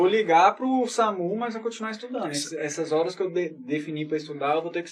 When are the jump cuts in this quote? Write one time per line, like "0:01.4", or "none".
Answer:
none

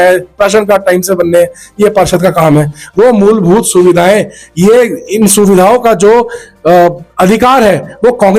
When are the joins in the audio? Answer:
none

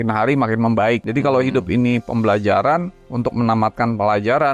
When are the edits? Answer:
0:01.1
0:03.0

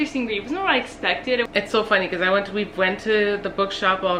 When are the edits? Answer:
0:01.5

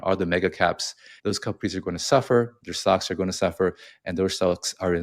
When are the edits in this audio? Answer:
0:01.1

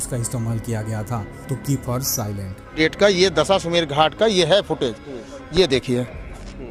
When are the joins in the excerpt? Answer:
0:02.7

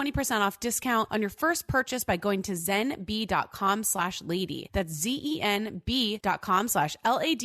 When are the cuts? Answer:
0:01.1
0:04.6
0:06.2

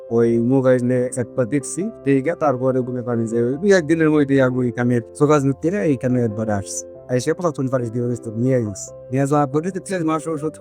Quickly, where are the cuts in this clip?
none

